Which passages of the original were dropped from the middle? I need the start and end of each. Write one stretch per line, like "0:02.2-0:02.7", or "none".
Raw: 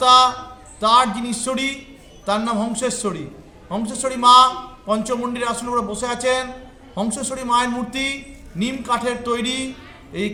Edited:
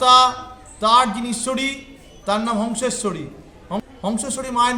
0:03.8-0:06.7